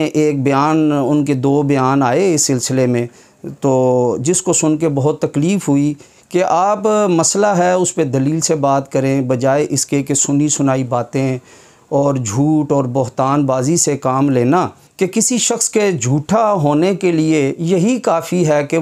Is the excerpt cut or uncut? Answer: cut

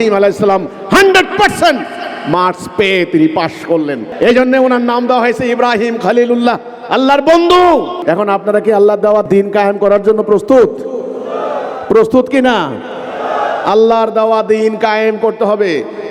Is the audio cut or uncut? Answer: cut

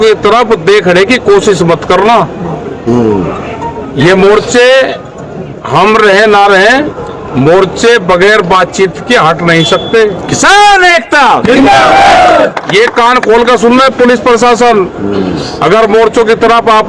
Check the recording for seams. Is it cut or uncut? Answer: uncut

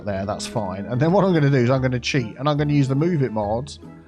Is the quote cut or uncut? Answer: uncut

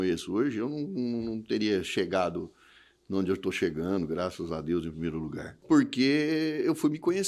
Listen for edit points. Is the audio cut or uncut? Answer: cut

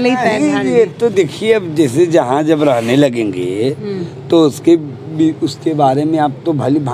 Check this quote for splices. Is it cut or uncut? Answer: uncut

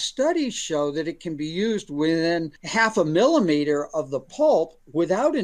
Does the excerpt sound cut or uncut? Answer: cut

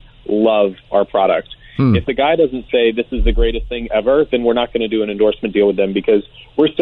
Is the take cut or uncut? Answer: uncut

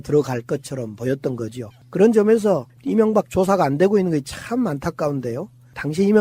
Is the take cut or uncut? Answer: uncut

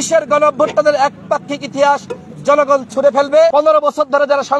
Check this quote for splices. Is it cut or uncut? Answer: cut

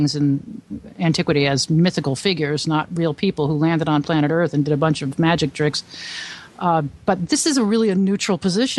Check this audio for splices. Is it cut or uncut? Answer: uncut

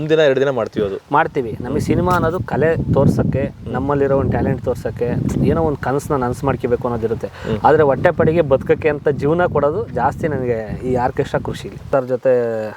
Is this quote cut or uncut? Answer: cut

